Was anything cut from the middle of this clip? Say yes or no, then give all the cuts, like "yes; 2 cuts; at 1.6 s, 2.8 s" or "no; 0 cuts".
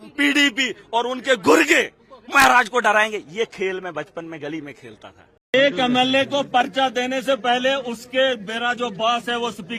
no; 0 cuts